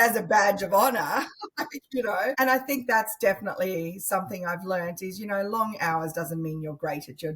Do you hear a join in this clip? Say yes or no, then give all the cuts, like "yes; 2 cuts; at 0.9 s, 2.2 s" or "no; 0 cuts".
yes; 1 cut; at 2.4 s